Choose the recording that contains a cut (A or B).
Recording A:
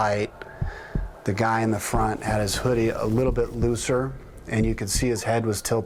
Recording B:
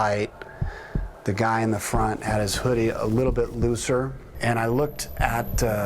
B